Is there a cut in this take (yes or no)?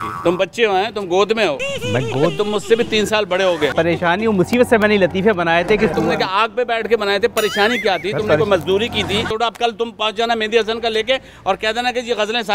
yes